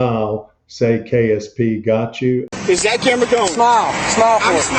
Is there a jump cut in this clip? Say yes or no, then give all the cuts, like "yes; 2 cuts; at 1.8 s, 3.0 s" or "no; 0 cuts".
no; 0 cuts